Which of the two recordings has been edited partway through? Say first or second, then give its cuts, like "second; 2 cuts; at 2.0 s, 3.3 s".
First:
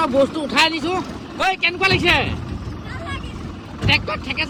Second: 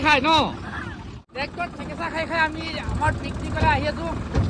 second; 1 cut; at 1.2 s